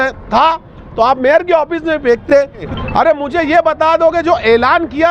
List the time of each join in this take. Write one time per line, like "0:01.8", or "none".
0:02.3